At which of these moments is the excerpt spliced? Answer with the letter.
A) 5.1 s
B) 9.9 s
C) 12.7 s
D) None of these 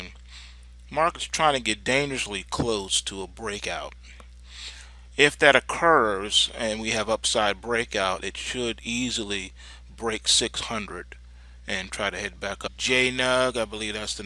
D